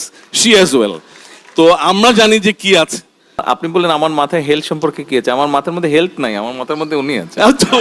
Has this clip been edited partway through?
yes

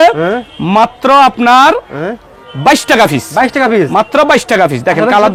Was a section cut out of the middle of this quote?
no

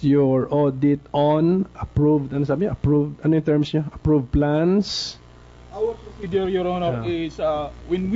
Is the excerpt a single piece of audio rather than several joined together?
no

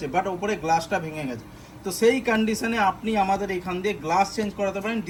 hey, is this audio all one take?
yes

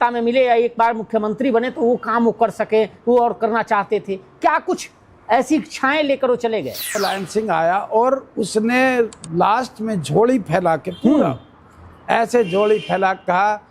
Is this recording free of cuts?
no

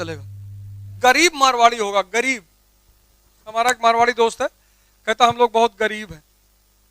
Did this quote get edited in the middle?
yes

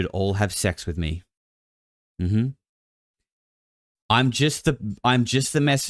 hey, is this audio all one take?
yes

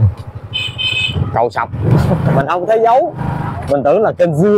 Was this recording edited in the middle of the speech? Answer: yes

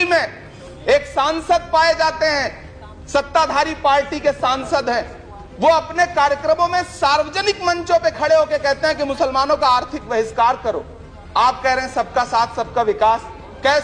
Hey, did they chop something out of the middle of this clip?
no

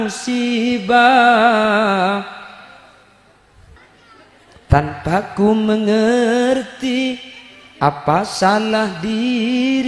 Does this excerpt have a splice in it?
yes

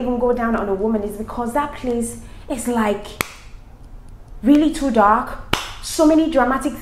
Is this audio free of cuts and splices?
yes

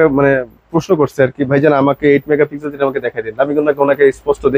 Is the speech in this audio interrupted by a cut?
no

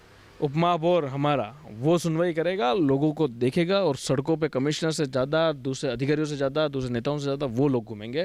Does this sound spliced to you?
no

